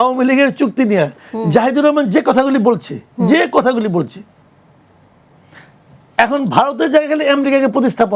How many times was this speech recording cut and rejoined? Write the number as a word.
zero